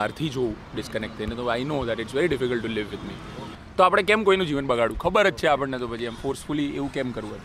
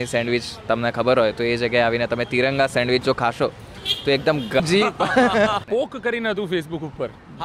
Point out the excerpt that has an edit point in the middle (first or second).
second